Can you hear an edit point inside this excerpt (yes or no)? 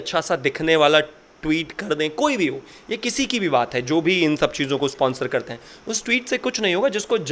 no